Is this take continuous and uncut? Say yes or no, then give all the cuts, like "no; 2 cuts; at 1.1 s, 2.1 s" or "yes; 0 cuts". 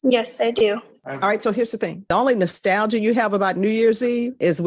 no; 2 cuts; at 1.0 s, 2.0 s